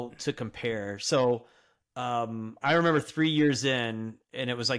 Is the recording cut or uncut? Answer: uncut